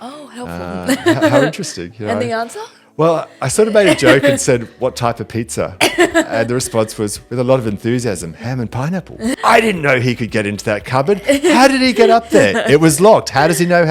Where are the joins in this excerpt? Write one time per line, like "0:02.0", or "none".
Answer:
0:09.4